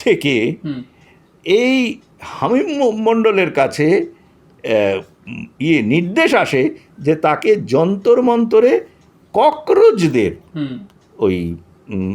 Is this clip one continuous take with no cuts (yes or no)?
yes